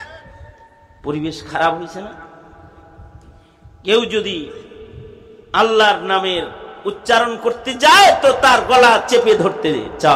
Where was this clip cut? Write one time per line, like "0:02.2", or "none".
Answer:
none